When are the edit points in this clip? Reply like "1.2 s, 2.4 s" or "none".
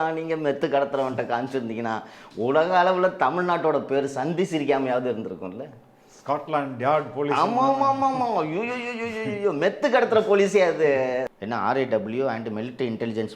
11.3 s